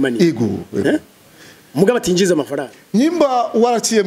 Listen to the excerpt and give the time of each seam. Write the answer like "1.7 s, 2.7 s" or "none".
2.7 s